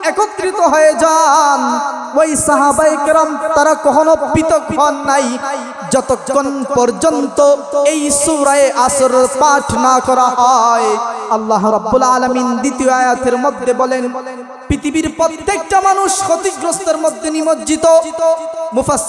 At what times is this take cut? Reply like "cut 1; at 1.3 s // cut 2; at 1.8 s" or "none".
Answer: cut 1; at 2.0 s // cut 2; at 11.2 s